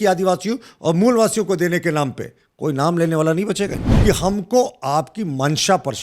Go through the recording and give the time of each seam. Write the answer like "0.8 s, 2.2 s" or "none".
3.9 s